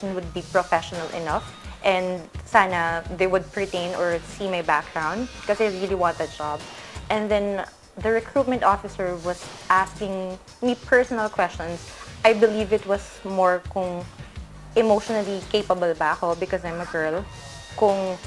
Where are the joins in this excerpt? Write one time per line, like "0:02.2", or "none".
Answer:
0:07.8